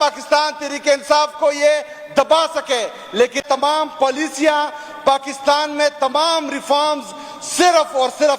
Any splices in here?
yes; 1 cut; at 3.4 s

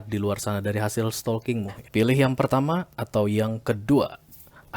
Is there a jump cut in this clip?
yes; 1 cut; at 1.8 s

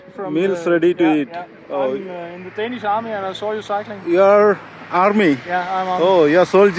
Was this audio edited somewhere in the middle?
no; 0 cuts

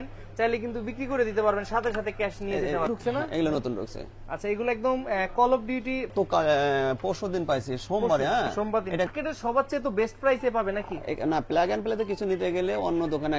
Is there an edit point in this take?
yes; 3 cuts; at 2.9 s, 6.1 s, 9.1 s

